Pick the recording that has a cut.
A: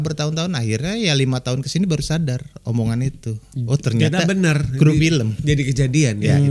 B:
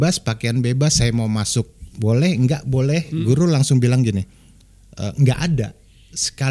B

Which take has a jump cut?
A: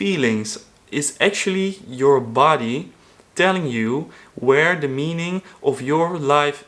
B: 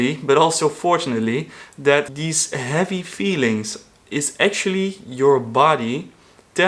B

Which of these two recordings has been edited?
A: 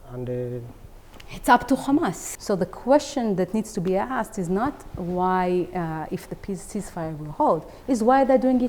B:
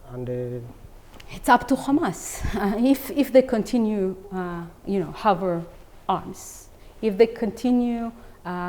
A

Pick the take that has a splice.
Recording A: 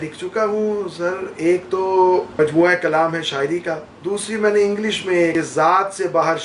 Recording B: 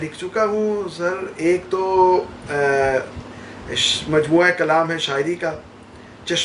A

